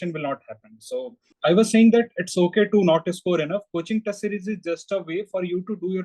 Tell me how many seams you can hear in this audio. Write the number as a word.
one